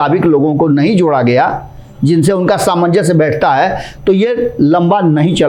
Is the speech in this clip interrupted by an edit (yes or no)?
no